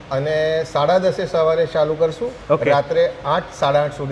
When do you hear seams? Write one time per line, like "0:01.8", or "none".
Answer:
none